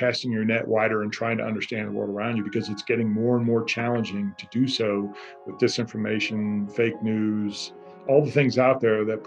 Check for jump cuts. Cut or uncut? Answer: cut